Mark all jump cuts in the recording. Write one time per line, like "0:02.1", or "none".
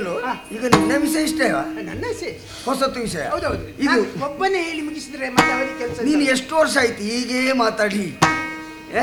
none